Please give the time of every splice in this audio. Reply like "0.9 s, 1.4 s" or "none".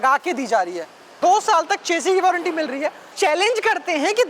1.0 s, 3.1 s